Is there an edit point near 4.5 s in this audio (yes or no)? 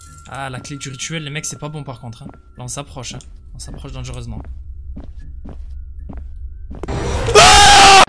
no